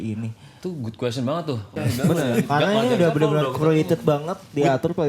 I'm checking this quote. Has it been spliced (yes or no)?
yes